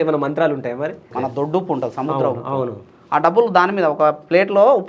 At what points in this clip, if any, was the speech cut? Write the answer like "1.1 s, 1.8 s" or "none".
1.1 s